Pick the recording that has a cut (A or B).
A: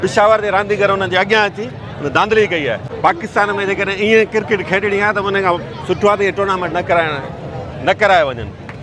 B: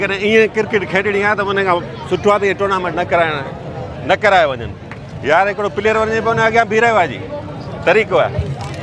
A